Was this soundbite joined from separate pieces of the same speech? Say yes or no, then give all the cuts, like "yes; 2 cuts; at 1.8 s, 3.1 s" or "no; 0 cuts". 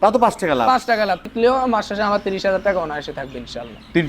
yes; 1 cut; at 1.3 s